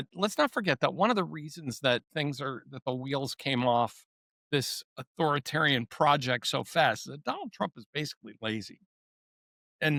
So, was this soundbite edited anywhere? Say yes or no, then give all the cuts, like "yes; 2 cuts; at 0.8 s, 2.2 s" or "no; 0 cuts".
no; 0 cuts